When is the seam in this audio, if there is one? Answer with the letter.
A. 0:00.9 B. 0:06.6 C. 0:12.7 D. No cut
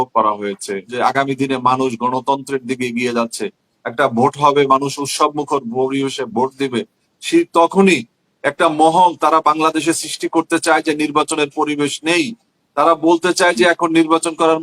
A